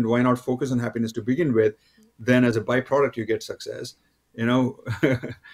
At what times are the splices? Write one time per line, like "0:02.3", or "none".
none